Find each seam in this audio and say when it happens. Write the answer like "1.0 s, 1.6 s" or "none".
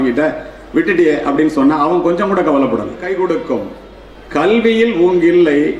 3.0 s